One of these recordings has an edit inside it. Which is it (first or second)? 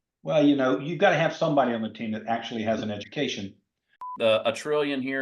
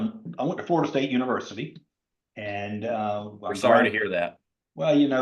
first